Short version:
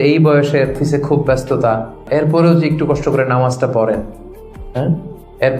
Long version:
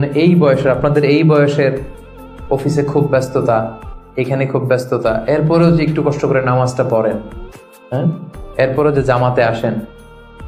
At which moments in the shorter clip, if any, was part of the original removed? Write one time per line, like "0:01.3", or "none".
0:00.8
0:02.0